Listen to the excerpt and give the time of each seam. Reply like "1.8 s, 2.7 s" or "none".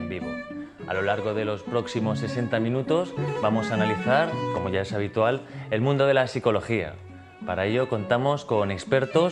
none